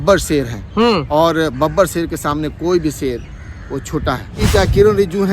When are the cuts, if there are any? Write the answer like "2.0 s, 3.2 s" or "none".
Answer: 4.4 s